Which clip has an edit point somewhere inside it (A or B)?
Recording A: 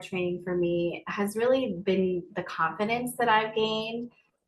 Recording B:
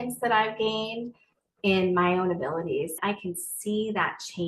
B